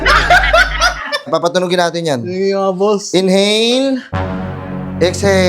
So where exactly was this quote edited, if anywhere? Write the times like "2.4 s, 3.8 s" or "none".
1.3 s

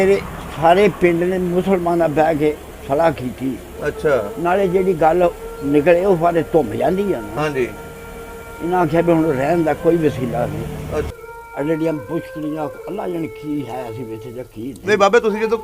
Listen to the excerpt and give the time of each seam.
11.1 s

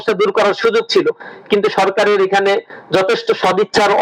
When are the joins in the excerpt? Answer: none

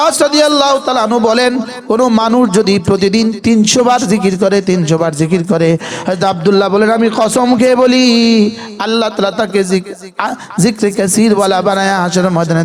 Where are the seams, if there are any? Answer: none

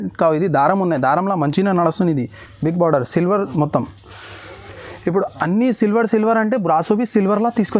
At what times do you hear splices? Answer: none

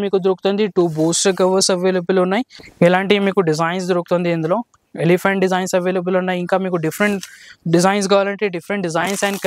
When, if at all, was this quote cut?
2.6 s

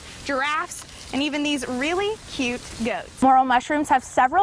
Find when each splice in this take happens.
3.1 s

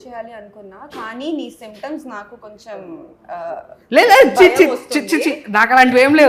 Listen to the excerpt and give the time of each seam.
none

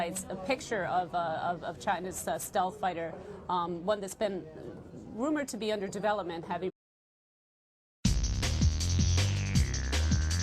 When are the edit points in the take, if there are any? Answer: none

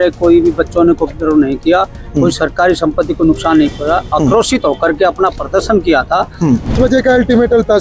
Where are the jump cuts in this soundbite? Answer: 6.7 s

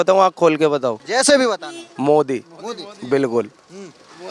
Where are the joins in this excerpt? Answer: 1.0 s

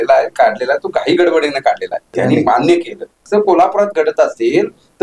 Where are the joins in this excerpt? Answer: 2.0 s, 3.2 s

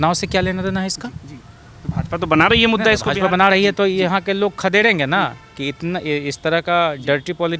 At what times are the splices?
none

